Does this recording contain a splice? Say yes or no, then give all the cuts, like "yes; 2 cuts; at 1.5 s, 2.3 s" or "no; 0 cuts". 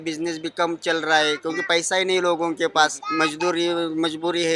yes; 1 cut; at 3.0 s